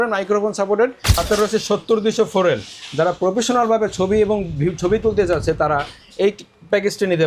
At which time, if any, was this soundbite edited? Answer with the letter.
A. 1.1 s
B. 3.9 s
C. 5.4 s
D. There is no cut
A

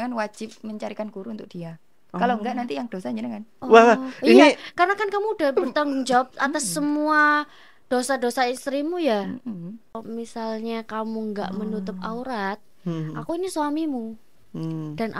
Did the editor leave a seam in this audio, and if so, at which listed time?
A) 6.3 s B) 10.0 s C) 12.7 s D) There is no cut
B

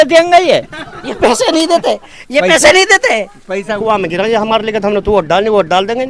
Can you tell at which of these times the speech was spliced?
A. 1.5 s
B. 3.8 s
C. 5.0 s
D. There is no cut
B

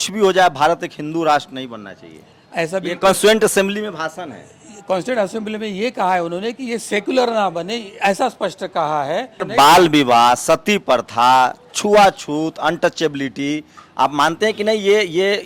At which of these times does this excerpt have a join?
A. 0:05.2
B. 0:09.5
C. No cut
B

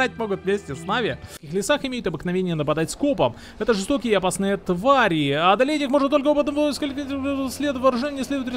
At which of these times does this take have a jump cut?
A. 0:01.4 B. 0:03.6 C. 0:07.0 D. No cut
A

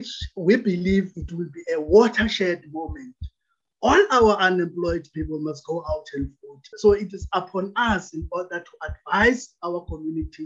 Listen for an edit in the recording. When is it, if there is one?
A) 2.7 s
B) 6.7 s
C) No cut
B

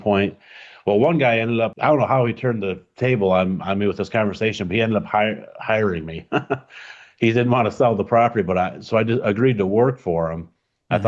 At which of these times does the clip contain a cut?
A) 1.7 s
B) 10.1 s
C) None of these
A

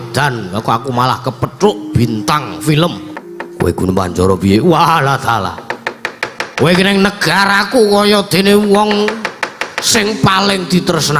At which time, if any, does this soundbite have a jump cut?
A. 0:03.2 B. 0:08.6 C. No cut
A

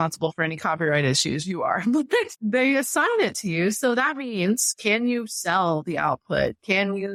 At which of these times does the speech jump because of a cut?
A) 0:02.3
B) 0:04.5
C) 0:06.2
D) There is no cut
D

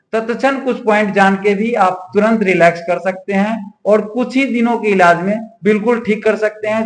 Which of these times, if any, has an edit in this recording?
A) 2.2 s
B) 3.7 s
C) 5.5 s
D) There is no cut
D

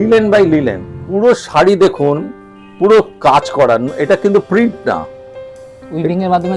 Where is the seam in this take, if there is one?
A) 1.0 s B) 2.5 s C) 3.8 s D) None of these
A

